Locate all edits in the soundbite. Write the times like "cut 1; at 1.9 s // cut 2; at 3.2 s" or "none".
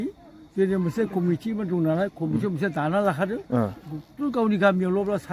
none